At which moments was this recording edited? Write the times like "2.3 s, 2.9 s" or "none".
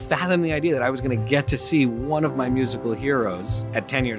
none